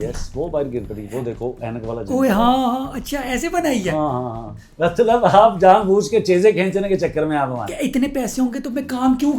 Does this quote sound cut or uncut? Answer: cut